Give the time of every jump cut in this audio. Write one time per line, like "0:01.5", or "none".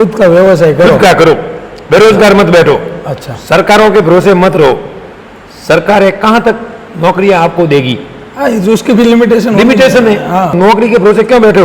0:10.6